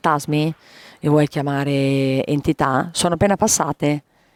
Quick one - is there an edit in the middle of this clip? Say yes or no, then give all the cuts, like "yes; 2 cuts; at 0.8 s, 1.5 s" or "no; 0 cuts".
no; 0 cuts